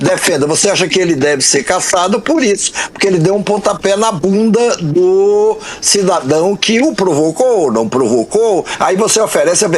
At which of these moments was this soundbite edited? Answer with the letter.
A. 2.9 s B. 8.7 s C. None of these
B